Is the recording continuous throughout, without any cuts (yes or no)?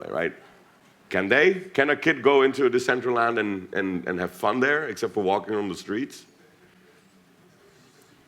yes